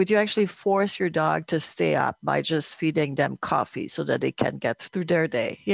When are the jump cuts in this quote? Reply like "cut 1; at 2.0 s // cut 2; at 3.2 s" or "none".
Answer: cut 1; at 4.8 s